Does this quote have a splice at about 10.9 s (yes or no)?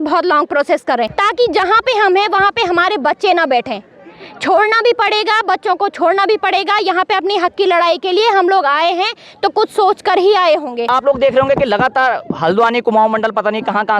yes